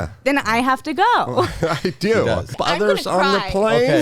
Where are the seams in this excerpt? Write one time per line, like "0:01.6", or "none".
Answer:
0:02.6

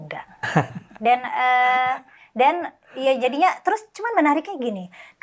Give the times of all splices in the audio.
none

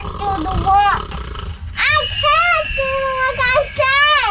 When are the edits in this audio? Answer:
none

